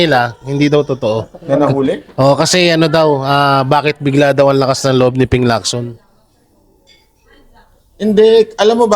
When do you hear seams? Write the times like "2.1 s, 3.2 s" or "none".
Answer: none